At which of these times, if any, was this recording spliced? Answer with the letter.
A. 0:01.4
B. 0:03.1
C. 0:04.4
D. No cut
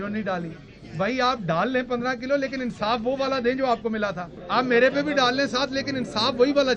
C